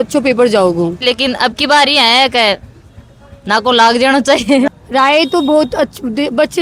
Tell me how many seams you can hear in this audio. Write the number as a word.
two